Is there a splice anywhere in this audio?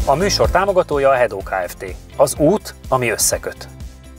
no; 0 cuts

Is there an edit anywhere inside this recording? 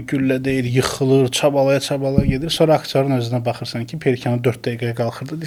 no; 0 cuts

